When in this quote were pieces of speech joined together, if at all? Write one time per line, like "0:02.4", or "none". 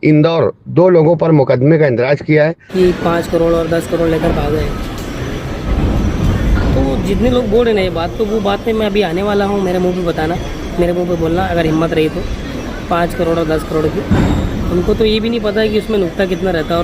0:02.6